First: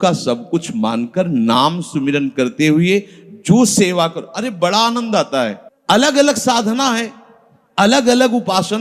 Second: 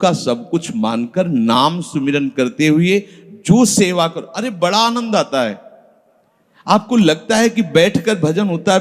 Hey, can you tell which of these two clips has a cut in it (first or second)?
first